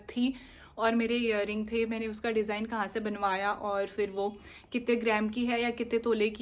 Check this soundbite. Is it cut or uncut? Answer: uncut